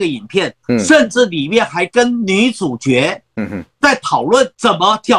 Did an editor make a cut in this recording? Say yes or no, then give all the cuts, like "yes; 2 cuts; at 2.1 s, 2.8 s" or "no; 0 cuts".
no; 0 cuts